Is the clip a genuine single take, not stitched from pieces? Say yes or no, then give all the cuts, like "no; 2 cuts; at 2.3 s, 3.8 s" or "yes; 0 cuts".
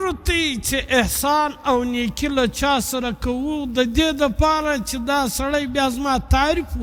yes; 0 cuts